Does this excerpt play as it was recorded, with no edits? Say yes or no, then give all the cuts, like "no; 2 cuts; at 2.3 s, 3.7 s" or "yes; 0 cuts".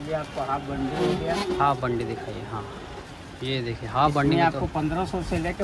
yes; 0 cuts